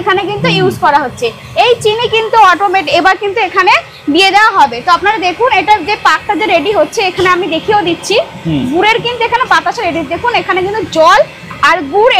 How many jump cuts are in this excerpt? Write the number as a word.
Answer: zero